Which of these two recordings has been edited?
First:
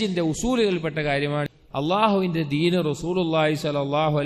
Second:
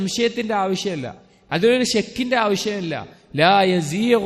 first; 1 cut; at 1.5 s

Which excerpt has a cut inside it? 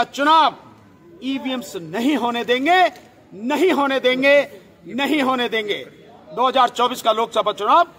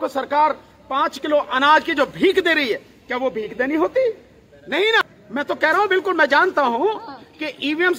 second; 1 cut; at 5.2 s

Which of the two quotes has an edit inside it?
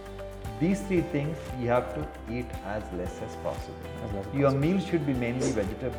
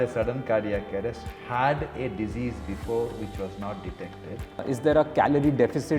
second; 1 cut; at 4.6 s

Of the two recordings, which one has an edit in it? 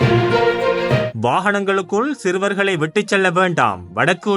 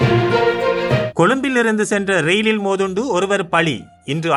first; 1 cut; at 1.1 s

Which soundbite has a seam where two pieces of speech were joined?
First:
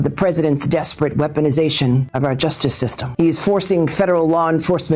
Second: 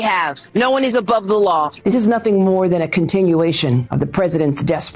second; 1 cut; at 1.8 s

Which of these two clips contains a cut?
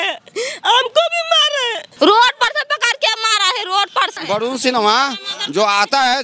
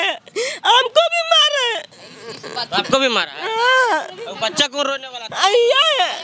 first; 2 cuts; at 1.8 s, 4.1 s

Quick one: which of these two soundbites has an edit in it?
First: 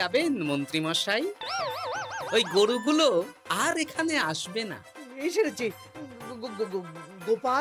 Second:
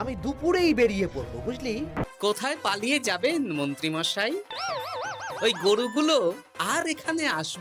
second; 1 cut; at 2.0 s

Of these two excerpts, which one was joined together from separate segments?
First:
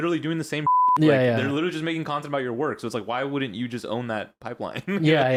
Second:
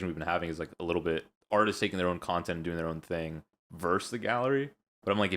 second; 1 cut; at 1.3 s

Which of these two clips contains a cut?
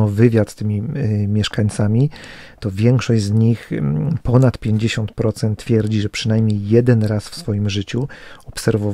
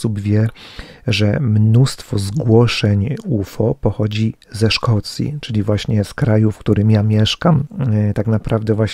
second; 1 cut; at 8.0 s

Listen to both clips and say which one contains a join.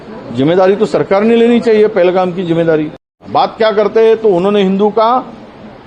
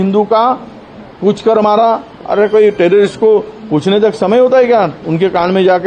first; 1 cut; at 3.2 s

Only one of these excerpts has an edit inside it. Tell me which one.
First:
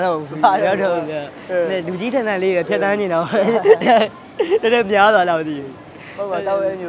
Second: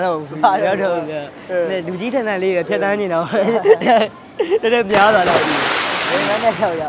second; 1 cut; at 6.0 s

